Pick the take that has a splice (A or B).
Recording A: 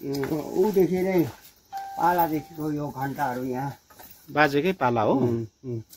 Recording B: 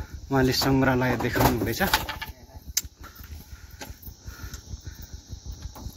B